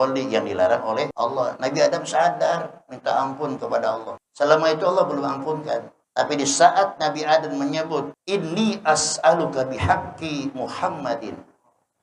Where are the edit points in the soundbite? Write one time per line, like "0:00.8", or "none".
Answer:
0:01.1
0:04.2
0:06.0
0:08.1